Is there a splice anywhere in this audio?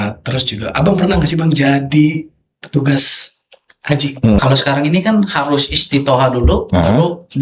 yes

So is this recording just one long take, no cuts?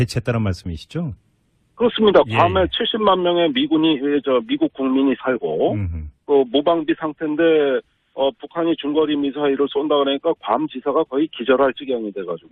yes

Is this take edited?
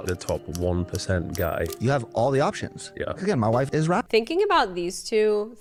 no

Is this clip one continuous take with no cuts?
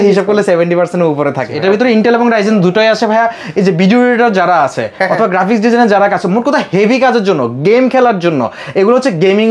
no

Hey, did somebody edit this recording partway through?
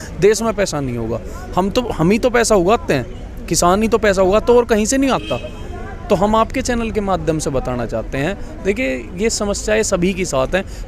no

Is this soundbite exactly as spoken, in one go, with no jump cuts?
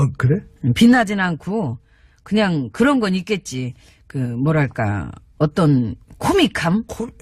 no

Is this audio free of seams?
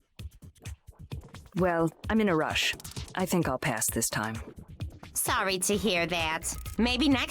no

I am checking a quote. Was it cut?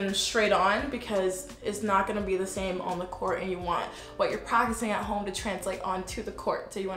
no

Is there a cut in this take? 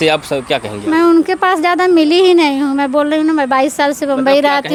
no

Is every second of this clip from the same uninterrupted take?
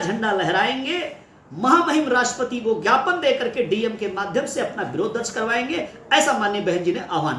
yes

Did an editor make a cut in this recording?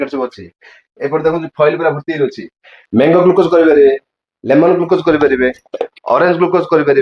yes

